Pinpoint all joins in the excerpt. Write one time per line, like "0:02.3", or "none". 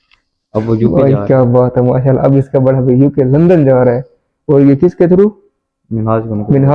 none